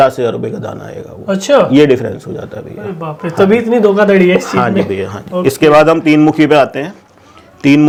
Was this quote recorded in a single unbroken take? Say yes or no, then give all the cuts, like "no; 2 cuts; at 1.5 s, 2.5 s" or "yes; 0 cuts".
yes; 0 cuts